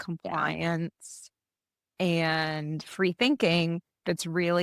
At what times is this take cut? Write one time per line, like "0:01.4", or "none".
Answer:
none